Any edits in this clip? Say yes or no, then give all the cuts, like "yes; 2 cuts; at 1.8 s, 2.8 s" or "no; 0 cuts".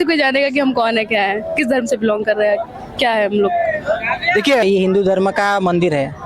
yes; 1 cut; at 4.6 s